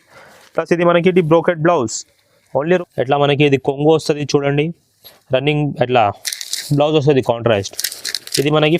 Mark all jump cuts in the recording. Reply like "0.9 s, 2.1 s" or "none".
2.8 s